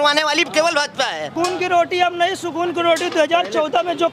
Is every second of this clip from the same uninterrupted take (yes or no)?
no